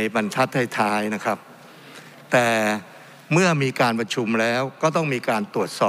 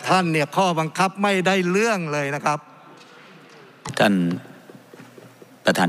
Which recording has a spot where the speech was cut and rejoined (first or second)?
second